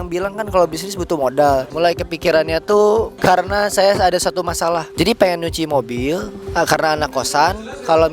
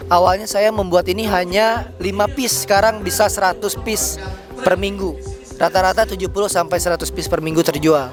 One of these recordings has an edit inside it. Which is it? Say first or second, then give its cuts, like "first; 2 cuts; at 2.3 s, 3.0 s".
first; 4 cuts; at 1.7 s, 3.1 s, 4.9 s, 6.4 s